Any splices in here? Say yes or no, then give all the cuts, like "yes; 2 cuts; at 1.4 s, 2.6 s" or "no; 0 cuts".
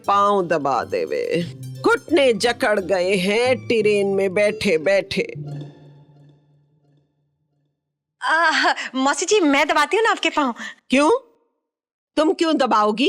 no; 0 cuts